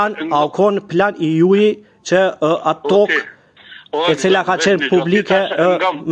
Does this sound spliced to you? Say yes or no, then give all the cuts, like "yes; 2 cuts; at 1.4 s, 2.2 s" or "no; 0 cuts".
no; 0 cuts